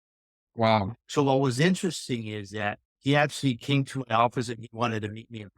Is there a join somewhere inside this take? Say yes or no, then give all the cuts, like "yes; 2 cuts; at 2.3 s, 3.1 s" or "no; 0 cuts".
yes; 2 cuts; at 1.0 s, 2.9 s